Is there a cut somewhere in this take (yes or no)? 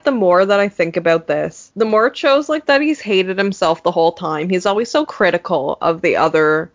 no